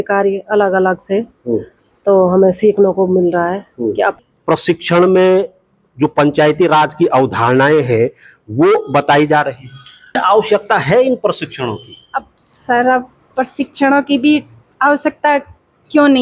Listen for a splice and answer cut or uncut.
cut